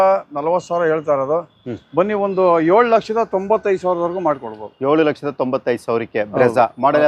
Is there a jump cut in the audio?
no; 0 cuts

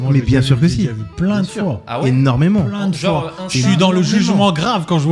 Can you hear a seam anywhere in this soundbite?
no; 0 cuts

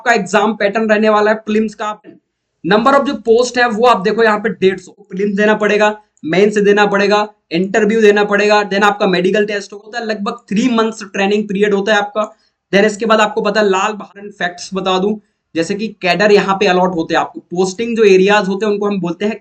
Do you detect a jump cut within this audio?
yes; 4 cuts; at 2.0 s, 5.1 s, 9.9 s, 14.1 s

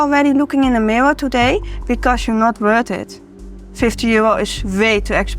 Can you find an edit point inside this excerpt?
no; 0 cuts

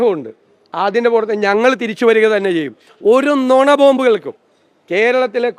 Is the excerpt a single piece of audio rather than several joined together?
no; 1 cut; at 2.9 s

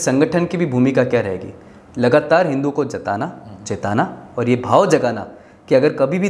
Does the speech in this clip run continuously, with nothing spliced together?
yes; 0 cuts

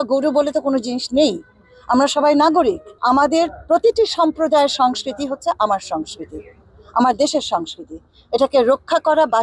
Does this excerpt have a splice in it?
yes; 1 cut; at 2.9 s

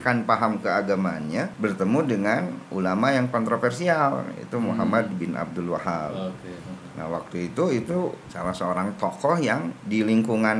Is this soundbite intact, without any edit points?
no; 3 cuts; at 1.5 s, 8.3 s, 9.8 s

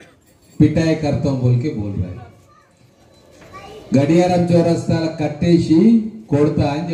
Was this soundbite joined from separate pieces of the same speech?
no; 0 cuts

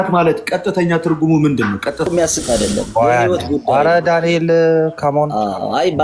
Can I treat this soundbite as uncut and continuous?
no; 1 cut; at 2.1 s

